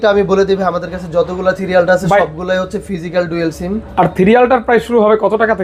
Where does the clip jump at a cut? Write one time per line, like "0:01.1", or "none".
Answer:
none